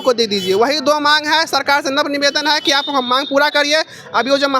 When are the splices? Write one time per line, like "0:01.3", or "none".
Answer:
none